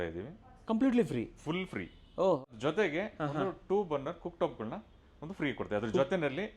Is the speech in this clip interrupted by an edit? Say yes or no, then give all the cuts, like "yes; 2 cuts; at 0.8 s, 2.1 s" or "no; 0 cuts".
yes; 1 cut; at 2.4 s